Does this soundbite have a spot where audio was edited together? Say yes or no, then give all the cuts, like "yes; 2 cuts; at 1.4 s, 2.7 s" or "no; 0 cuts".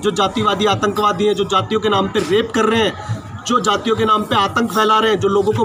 no; 0 cuts